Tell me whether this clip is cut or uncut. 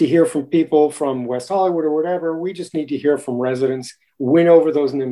uncut